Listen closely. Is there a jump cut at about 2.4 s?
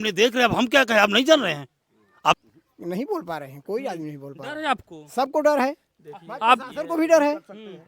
yes; 1 cut; at 2.4 s

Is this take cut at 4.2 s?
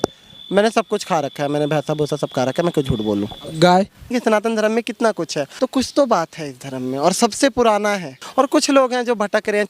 yes; 3 cuts; at 4.2 s, 5.5 s, 8.2 s

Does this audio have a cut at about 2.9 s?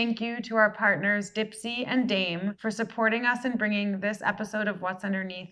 no; 0 cuts

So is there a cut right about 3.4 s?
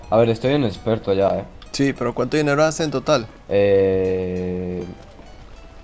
no; 1 cut; at 1.6 s

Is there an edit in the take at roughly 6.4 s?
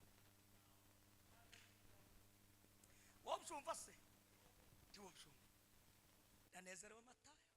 yes; 1 cut; at 6.4 s

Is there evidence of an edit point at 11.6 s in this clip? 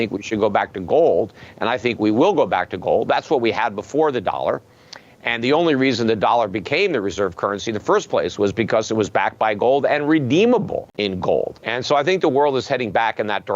yes; 2 cuts; at 10.9 s, 11.6 s

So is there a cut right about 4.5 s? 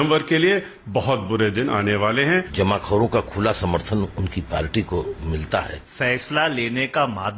no; 2 cuts; at 2.5 s, 5.8 s

